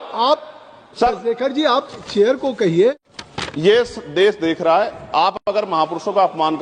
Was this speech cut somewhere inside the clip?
yes; 1 cut; at 3.0 s

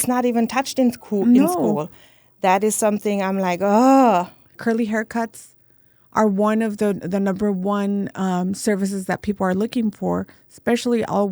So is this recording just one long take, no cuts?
no; 1 cut; at 4.6 s

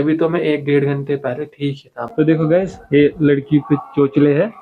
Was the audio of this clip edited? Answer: yes; 1 cut; at 2.0 s

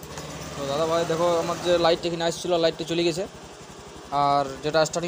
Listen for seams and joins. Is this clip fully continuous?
yes; 0 cuts

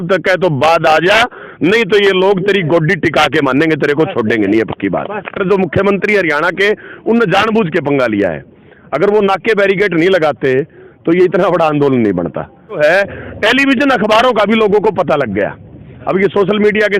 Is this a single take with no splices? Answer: no; 2 cuts; at 5.3 s, 12.8 s

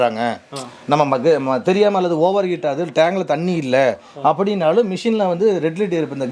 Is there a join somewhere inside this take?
no; 0 cuts

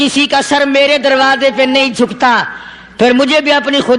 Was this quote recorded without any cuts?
yes; 0 cuts

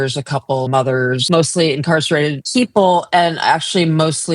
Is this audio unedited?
no; 2 cuts; at 0.9 s, 2.4 s

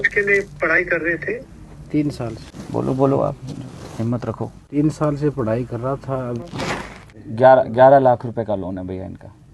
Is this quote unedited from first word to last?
no; 1 cut; at 6.4 s

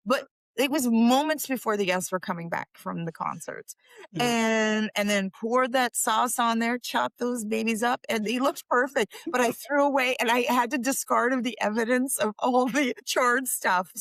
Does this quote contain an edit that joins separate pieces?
no; 0 cuts

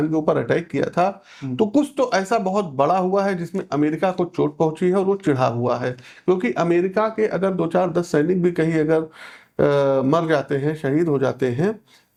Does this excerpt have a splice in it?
no; 0 cuts

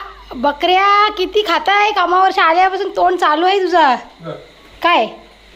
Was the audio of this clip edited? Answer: no; 0 cuts

